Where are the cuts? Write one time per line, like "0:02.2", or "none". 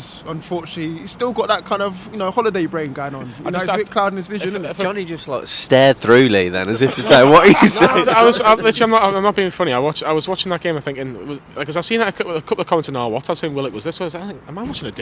none